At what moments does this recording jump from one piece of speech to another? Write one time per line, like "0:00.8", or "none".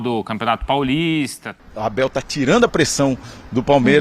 0:01.4

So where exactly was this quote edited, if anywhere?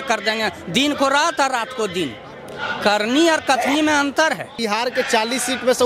0:04.6

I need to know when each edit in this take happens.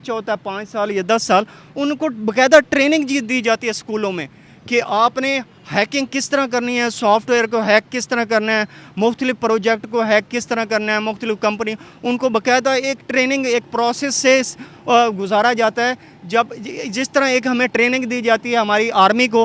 none

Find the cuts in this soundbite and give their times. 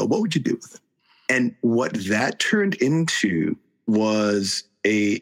0:03.7

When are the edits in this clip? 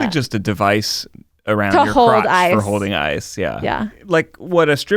0:04.0

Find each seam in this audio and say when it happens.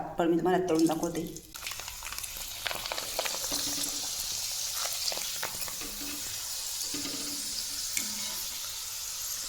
0:01.0

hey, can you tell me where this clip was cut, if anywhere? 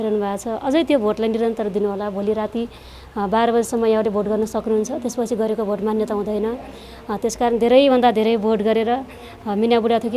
none

